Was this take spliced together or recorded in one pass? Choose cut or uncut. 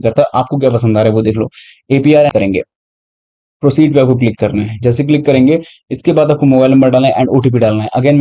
cut